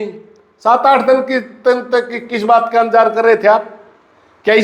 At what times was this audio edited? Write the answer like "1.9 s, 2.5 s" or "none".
1.3 s